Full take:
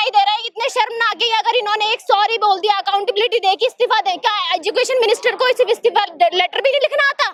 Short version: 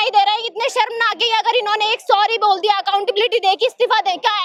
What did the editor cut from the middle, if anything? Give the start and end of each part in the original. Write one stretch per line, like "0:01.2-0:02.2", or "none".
none